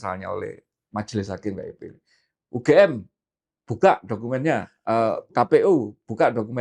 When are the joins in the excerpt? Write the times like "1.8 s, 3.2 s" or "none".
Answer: none